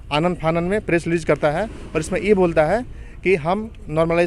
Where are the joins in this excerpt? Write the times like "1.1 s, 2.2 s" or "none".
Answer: none